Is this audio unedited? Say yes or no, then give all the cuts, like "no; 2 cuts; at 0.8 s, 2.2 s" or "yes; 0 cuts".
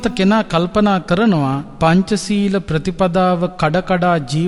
no; 1 cut; at 1.7 s